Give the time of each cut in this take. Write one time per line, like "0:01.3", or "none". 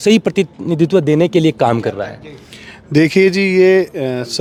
none